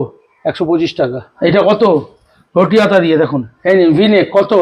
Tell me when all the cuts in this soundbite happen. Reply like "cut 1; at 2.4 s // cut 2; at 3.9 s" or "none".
cut 1; at 1.3 s // cut 2; at 3.5 s